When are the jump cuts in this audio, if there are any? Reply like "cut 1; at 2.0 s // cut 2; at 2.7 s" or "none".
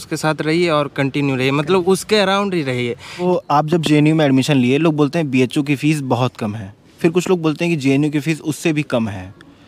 cut 1; at 3.2 s